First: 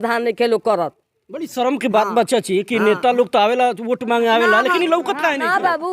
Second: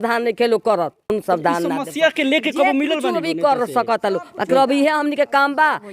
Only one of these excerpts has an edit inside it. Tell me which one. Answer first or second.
second